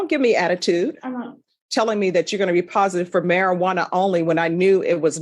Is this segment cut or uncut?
cut